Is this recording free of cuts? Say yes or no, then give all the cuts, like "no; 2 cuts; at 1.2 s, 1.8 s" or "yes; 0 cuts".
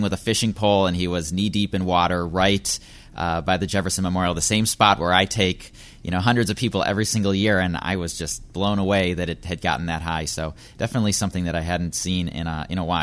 yes; 0 cuts